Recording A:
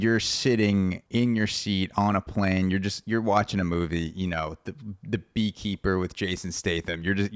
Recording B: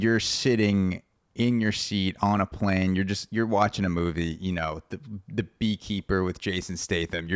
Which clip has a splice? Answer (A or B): A